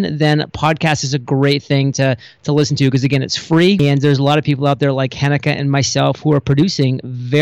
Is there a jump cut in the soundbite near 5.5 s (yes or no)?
no